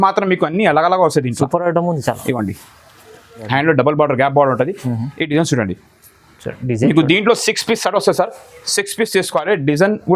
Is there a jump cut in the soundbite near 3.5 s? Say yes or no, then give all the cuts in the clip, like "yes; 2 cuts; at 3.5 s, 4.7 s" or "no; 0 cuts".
yes; 1 cut; at 3.5 s